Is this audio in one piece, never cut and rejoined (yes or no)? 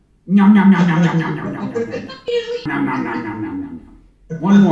no